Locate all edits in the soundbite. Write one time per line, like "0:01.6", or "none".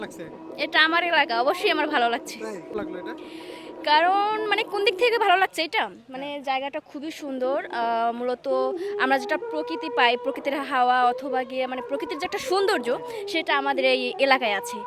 0:02.8